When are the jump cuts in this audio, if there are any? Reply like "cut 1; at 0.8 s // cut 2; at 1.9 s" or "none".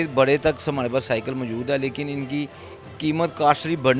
none

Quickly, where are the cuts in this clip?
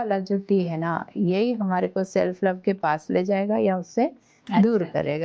none

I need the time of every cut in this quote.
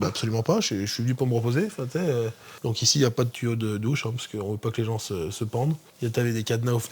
cut 1; at 2.5 s // cut 2; at 5.9 s

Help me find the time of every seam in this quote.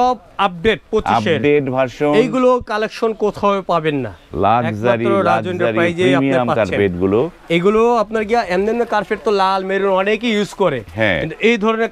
none

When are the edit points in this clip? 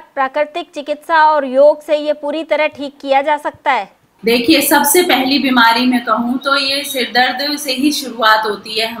cut 1; at 4.1 s

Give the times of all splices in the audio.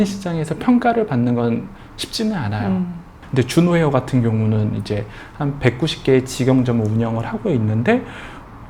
cut 1; at 3.2 s

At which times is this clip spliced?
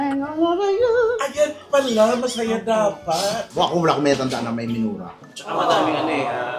cut 1; at 3.6 s

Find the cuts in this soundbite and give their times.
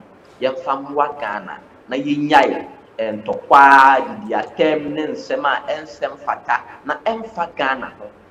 none

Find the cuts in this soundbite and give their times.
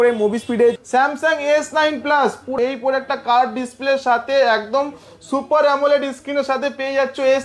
cut 1; at 0.8 s // cut 2; at 2.5 s

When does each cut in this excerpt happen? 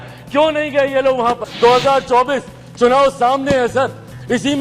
cut 1; at 1.5 s

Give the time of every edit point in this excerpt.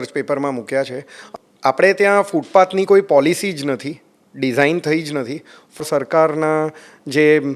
cut 1; at 1.2 s // cut 2; at 5.8 s

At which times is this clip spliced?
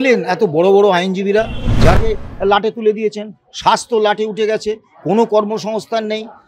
cut 1; at 2.0 s

